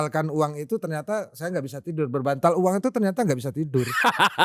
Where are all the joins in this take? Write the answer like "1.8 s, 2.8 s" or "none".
none